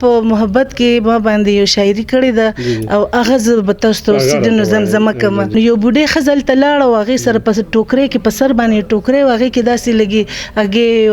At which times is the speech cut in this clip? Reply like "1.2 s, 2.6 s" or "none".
5.5 s